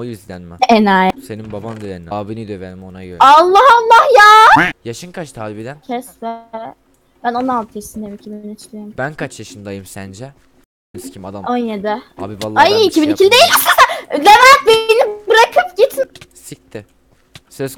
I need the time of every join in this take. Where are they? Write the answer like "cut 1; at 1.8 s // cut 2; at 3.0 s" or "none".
cut 1; at 4.6 s